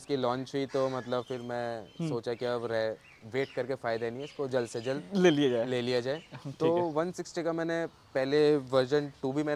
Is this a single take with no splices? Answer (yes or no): yes